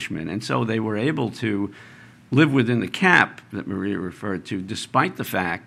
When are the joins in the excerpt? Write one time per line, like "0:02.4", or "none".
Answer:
none